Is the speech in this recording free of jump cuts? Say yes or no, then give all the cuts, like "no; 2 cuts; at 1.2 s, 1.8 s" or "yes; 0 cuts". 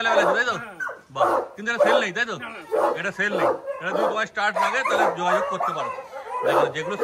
yes; 0 cuts